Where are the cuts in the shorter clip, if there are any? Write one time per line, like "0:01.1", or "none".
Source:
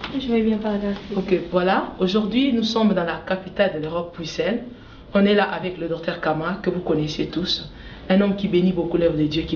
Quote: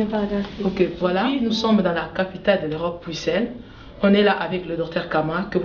0:01.3